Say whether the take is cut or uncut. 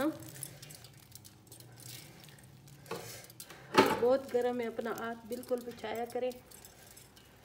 uncut